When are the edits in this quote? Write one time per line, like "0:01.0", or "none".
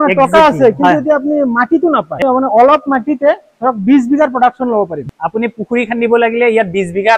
0:02.2
0:05.0

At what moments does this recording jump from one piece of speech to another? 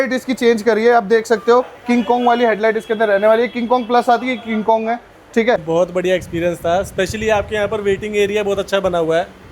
0:05.6

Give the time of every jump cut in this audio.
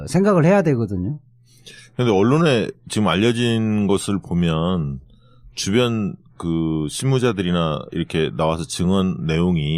0:04.2

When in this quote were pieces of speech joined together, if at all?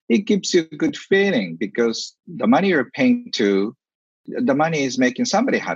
0:02.1
0:04.3

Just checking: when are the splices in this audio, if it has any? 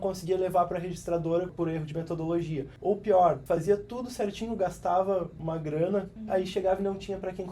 0:01.5
0:02.7
0:03.4
0:05.3
0:06.2

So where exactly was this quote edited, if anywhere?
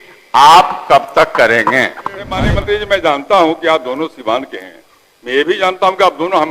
0:02.5

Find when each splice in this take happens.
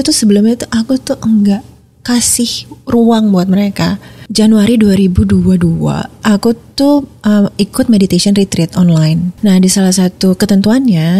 0:04.2
0:06.1
0:09.3

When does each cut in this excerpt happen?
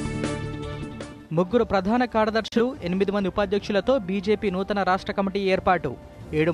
0:01.0

